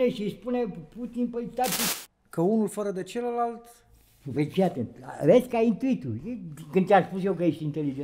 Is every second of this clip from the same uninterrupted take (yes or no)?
no